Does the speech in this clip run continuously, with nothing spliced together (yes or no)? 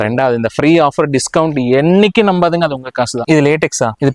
no